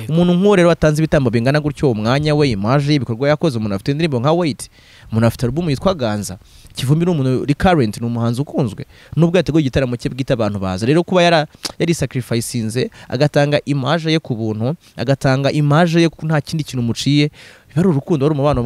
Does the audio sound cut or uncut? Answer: uncut